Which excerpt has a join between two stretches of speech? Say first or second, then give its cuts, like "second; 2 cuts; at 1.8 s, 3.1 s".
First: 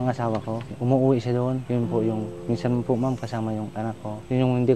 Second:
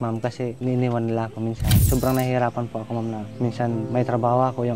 second; 1 cut; at 1.8 s